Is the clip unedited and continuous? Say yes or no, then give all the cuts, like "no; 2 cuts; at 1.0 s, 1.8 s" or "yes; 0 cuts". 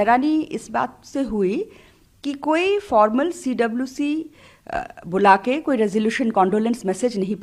yes; 0 cuts